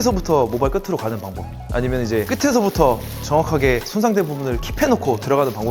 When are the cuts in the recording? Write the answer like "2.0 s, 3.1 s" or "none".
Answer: 2.3 s